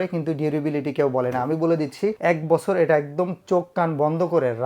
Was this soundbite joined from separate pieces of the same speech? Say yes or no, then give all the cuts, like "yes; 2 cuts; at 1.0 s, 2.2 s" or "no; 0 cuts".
yes; 1 cut; at 2.2 s